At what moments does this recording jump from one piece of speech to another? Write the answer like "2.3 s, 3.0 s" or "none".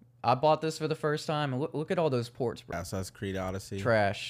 2.7 s